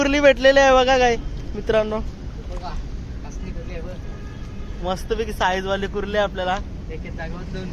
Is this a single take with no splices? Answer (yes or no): yes